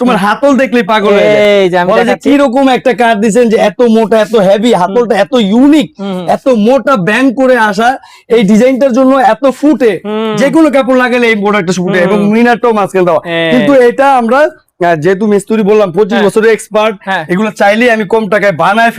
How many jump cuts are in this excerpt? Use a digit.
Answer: 0